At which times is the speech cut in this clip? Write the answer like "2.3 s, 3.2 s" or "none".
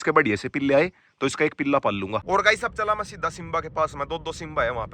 2.2 s